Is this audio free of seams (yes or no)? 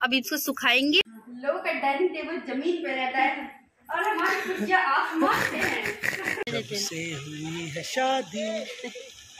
no